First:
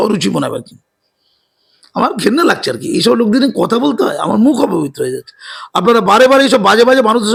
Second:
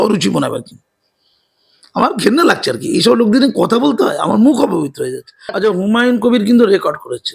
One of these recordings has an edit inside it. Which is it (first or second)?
second